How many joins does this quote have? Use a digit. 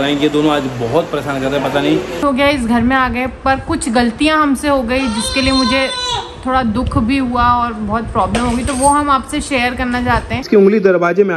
2